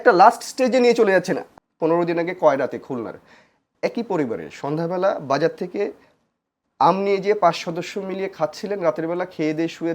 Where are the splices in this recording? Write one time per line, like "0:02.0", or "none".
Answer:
0:01.4